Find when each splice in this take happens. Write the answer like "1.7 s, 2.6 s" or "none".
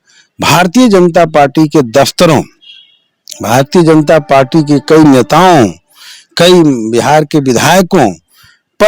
none